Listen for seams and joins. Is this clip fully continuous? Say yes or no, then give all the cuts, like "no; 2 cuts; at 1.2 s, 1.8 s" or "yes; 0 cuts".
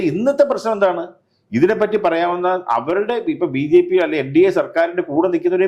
yes; 0 cuts